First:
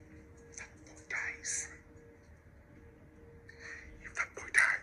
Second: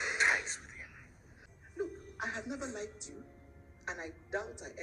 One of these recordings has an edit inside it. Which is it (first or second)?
second